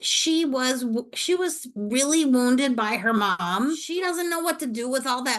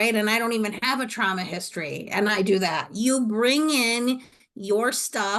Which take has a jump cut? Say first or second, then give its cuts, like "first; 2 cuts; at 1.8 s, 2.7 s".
first; 1 cut; at 3.8 s